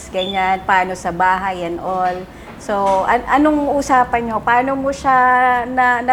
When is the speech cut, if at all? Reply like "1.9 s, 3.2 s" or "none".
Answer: none

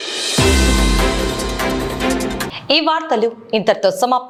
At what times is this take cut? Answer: none

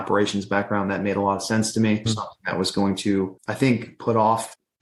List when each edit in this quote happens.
2.1 s

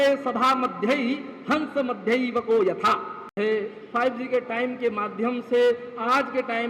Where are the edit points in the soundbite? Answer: 3.3 s

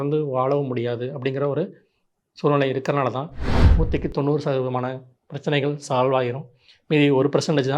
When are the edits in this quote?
3.5 s

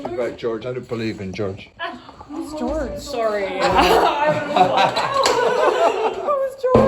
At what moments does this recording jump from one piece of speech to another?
none

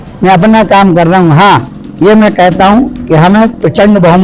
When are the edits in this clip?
none

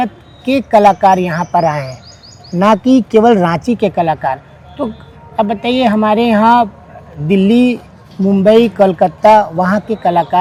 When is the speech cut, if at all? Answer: none

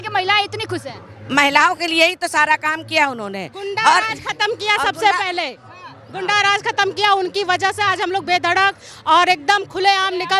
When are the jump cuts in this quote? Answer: none

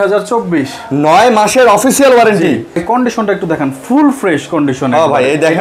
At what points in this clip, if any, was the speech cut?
2.8 s

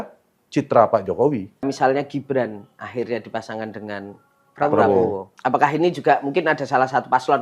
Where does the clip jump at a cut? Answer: 1.7 s, 5.3 s

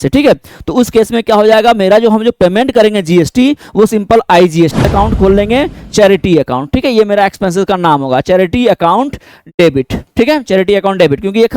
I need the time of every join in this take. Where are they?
4.8 s

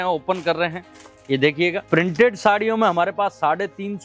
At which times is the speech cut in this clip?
1.8 s

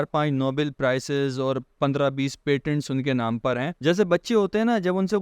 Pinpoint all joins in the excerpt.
3.7 s

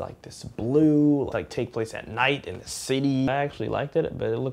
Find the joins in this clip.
1.3 s, 3.3 s

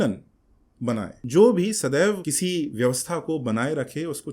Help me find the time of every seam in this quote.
1.2 s, 2.3 s

